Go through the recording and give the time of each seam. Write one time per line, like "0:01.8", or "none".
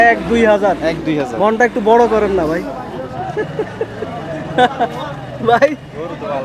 none